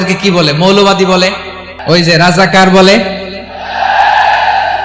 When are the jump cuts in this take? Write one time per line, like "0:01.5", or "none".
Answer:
0:01.7